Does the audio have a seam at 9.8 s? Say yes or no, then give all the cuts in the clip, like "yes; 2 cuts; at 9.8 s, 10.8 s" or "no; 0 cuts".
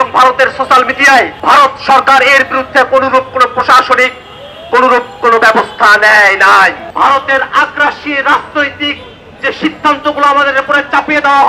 no; 1 cut; at 6.8 s